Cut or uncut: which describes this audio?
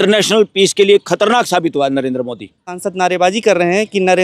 cut